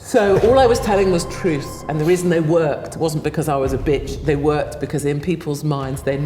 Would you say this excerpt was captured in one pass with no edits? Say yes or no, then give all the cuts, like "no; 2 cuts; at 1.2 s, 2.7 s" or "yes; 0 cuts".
yes; 0 cuts